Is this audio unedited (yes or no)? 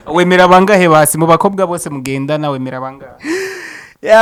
yes